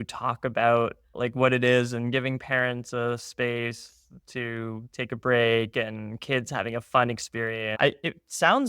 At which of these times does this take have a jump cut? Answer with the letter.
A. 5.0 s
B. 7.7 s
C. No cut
B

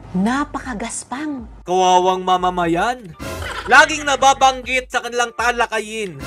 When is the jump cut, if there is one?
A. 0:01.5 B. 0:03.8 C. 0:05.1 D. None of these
D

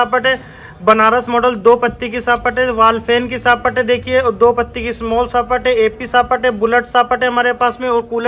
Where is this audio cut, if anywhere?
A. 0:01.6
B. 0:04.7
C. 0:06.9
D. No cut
D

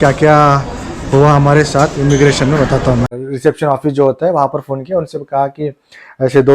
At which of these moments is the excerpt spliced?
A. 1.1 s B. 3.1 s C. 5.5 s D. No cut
B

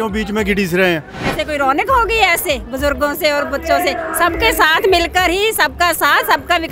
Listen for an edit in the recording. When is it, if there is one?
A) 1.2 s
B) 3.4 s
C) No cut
A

